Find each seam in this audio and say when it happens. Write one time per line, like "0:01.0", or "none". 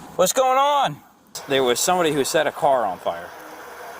0:01.4